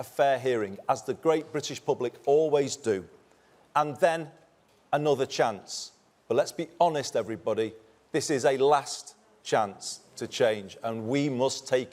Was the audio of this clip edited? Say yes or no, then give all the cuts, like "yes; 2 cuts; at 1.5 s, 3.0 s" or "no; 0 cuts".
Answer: no; 0 cuts